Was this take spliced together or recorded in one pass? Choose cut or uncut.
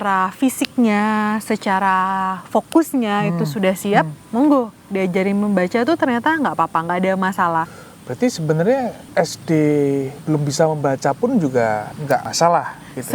cut